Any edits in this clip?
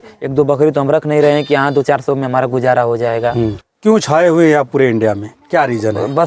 yes; 1 cut; at 3.7 s

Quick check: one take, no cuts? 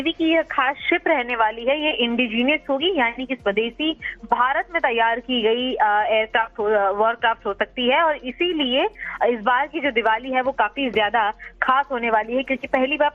yes; 0 cuts

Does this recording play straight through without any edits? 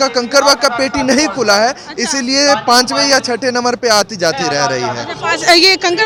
yes; 0 cuts

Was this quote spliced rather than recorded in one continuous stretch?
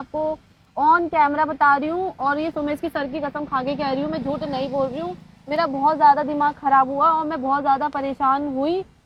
no; 0 cuts

